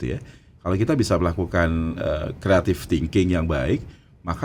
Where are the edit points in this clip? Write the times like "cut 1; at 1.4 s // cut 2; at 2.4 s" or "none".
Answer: none